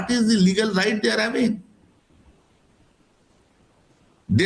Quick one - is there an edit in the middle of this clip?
no; 0 cuts

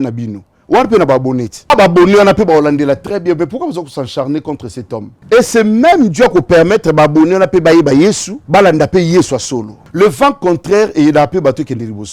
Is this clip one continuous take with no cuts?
no; 4 cuts; at 1.7 s, 5.1 s, 8.3 s, 9.8 s

